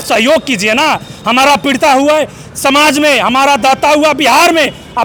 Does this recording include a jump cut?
no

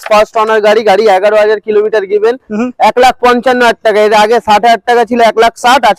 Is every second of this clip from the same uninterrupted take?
yes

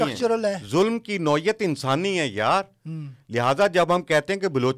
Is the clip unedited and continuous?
yes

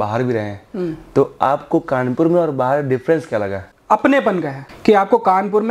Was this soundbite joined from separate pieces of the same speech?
yes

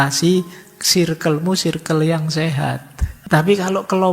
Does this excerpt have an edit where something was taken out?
yes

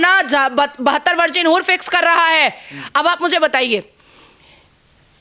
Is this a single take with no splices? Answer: yes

